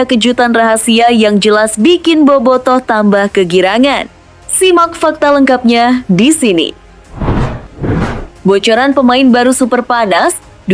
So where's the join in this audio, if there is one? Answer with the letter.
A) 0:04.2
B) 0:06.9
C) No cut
B